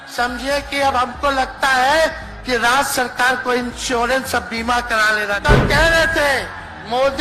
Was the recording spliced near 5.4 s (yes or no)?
yes